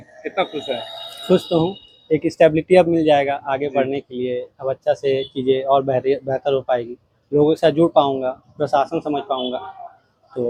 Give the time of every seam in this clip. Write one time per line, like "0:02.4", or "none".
none